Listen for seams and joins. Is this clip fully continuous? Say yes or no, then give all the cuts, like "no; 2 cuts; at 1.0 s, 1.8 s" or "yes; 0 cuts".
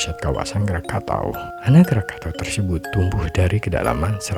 yes; 0 cuts